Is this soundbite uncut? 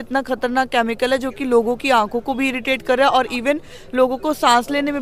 yes; 0 cuts

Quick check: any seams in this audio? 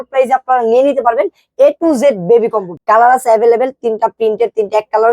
yes; 1 cut; at 2.7 s

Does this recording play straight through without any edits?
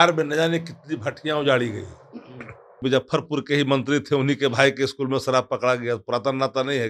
no; 1 cut; at 2.8 s

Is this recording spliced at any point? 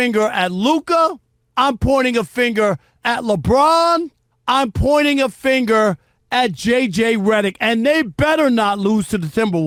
no; 0 cuts

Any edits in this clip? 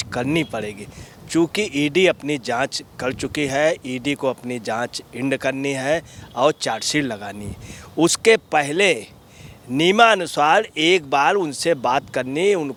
no; 0 cuts

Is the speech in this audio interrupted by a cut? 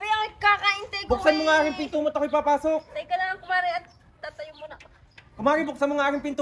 yes; 1 cut; at 5.2 s

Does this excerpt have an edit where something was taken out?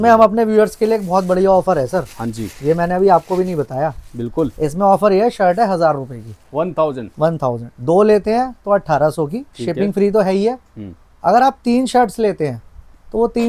no; 0 cuts

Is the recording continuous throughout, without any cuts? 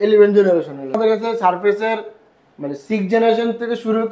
no; 1 cut; at 1.0 s

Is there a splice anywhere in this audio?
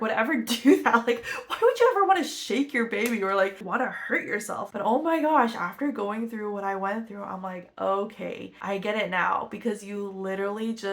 yes; 2 cuts; at 4.7 s, 8.5 s

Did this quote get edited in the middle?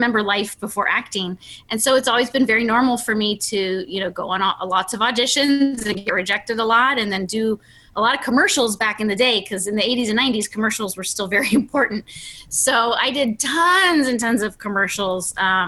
no; 0 cuts

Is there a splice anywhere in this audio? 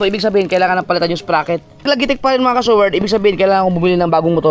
yes; 1 cut; at 1.8 s

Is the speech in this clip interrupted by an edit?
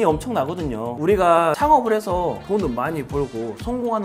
yes; 3 cuts; at 1.0 s, 1.6 s, 2.4 s

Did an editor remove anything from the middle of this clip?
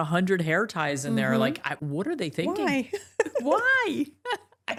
no; 0 cuts

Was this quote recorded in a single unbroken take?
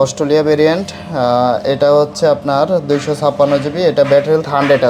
yes; 0 cuts

